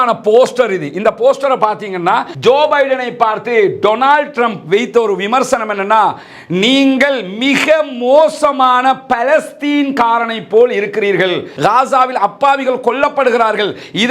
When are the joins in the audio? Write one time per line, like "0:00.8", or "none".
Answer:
0:02.3
0:11.5